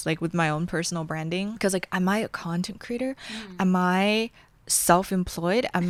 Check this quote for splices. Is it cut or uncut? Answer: uncut